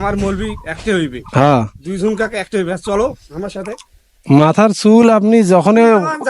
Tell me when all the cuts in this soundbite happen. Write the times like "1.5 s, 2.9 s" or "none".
1.2 s